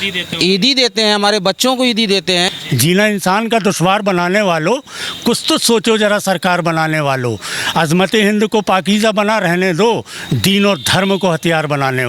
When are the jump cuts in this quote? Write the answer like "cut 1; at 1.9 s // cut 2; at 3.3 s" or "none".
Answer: cut 1; at 2.5 s